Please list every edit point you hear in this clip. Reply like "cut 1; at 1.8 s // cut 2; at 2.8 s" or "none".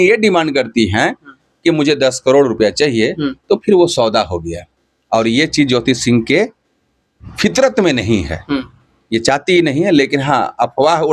none